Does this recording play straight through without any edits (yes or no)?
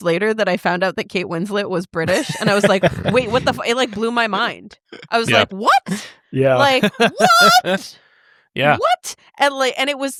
yes